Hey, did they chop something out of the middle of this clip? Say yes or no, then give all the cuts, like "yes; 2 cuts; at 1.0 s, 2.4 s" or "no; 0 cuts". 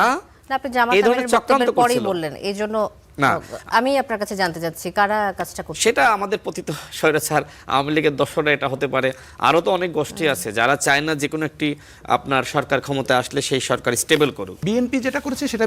yes; 1 cut; at 14.5 s